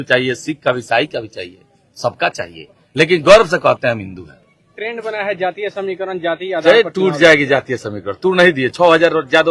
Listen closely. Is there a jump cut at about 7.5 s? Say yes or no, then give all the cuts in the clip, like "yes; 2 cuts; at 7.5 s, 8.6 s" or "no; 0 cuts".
no; 1 cut; at 4.7 s